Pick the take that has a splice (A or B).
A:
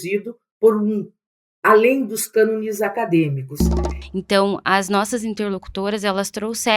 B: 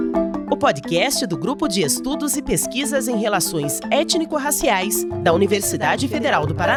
A